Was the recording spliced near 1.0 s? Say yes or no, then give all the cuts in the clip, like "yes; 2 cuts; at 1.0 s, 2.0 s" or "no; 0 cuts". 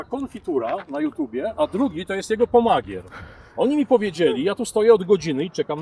no; 0 cuts